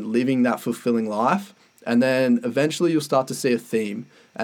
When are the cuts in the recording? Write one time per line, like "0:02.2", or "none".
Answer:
none